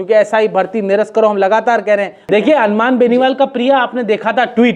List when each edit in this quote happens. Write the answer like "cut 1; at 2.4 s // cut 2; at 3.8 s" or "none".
none

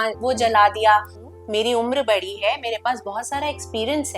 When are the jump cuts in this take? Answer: cut 1; at 1.2 s

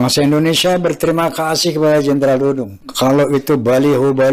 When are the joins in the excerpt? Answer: none

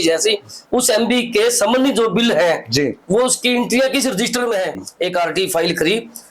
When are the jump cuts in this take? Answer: cut 1; at 4.8 s

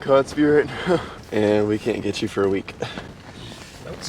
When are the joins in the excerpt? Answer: cut 1; at 1.2 s // cut 2; at 3.2 s

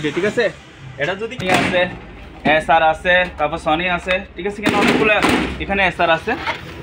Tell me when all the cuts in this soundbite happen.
cut 1; at 1.4 s

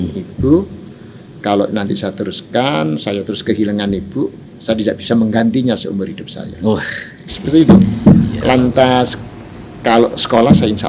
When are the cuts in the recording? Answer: none

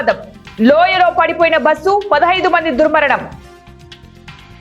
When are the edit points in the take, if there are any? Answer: cut 1; at 3.4 s

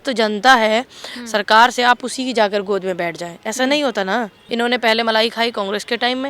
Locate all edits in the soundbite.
cut 1; at 4.4 s

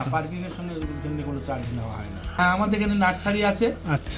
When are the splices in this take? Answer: cut 1; at 2.4 s

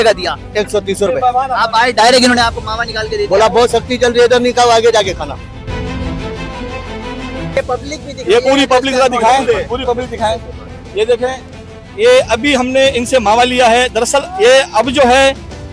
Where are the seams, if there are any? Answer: cut 1; at 7.6 s

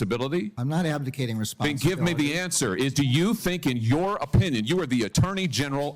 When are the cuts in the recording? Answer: cut 1; at 2.4 s

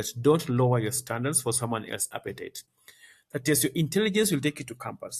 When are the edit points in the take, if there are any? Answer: cut 1; at 2.6 s

